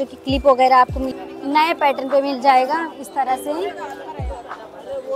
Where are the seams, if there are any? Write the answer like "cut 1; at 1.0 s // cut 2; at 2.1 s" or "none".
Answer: cut 1; at 1.1 s